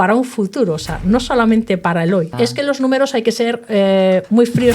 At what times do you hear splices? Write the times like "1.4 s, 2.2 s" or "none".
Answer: 2.3 s

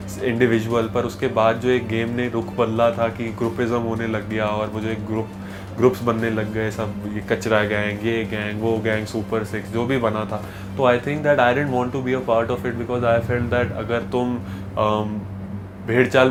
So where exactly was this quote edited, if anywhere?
none

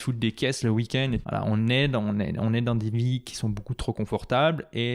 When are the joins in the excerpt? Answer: 1.2 s

